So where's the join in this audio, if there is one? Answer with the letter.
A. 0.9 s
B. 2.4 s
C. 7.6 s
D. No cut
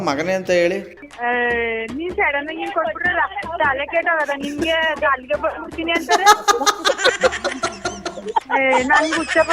A